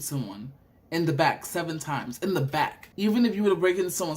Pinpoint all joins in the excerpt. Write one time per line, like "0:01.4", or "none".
0:02.8